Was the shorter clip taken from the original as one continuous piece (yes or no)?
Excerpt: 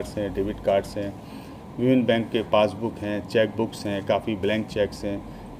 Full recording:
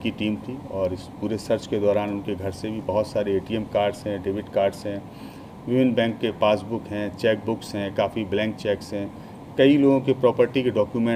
yes